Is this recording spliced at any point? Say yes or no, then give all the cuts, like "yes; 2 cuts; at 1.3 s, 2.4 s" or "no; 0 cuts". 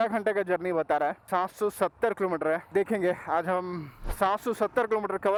no; 0 cuts